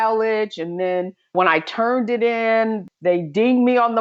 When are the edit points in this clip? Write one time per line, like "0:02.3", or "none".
0:01.4
0:02.9